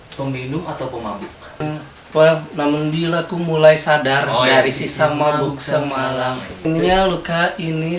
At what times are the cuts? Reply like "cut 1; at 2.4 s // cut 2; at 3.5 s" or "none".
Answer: cut 1; at 1.6 s // cut 2; at 6.6 s